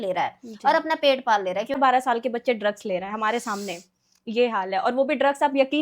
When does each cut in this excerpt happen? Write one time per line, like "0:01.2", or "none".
0:01.8